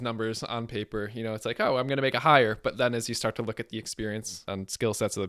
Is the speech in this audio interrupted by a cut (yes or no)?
yes